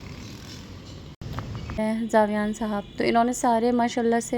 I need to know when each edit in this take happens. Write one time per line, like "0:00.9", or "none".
0:01.7